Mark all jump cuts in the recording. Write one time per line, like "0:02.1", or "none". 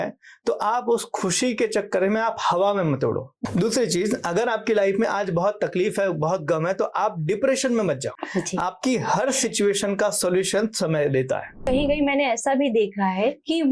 0:03.3
0:08.2
0:11.6